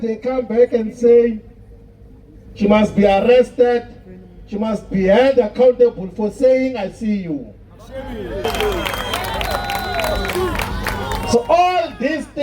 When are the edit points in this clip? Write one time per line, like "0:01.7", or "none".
0:08.4